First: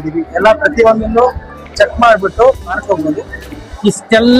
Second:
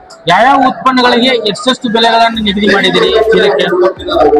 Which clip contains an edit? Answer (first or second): first